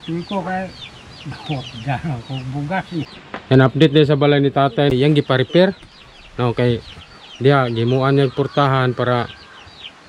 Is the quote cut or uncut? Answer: cut